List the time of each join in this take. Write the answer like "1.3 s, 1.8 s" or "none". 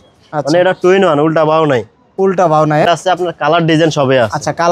2.9 s